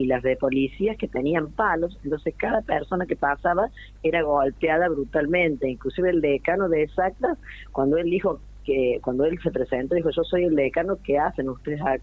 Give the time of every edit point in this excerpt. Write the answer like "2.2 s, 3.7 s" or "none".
none